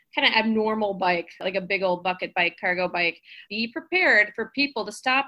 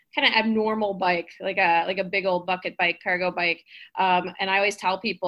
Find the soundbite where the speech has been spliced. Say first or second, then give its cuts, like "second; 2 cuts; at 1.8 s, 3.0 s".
first; 2 cuts; at 1.4 s, 3.4 s